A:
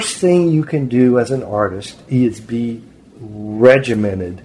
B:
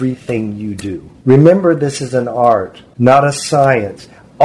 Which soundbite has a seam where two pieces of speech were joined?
B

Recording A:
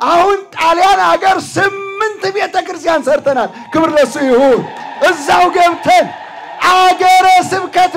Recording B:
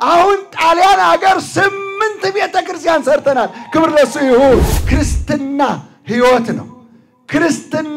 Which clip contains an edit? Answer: B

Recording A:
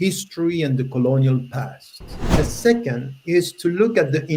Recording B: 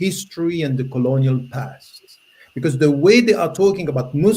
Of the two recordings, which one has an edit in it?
A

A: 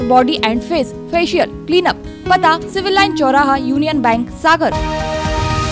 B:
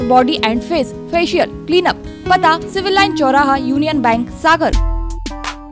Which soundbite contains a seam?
B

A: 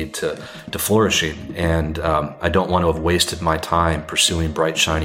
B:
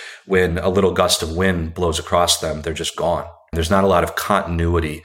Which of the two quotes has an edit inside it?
B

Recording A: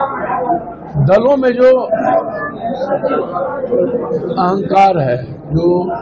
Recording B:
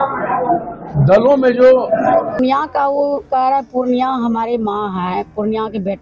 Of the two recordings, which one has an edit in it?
B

